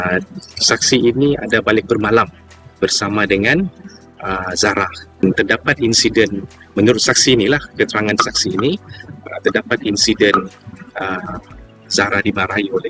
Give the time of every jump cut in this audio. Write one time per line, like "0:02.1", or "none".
0:05.2